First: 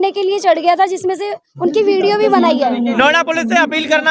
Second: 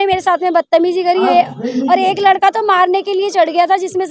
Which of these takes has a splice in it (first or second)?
first